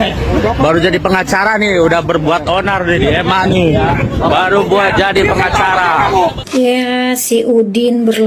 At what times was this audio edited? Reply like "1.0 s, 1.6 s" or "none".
6.4 s